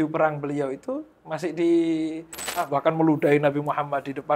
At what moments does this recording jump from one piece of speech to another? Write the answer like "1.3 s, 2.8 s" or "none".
2.6 s